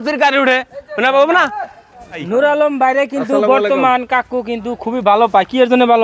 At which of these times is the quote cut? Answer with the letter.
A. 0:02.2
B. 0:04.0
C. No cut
A